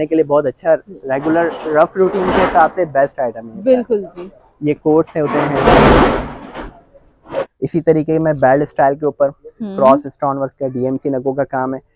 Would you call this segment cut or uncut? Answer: cut